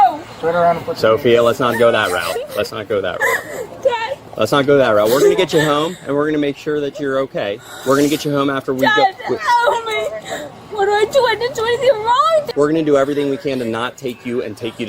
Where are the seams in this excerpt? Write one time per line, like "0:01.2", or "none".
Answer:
0:12.5